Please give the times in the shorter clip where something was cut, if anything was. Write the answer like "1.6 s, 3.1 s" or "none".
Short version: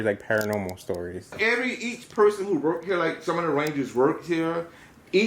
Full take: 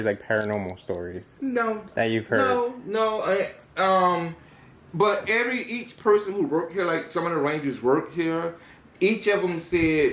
1.3 s